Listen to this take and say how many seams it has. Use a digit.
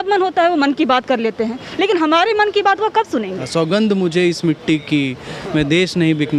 1